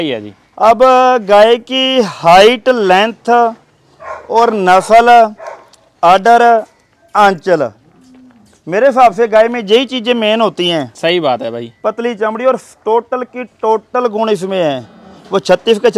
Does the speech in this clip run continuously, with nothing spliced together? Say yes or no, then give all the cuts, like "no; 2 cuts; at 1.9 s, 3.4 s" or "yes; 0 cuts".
yes; 0 cuts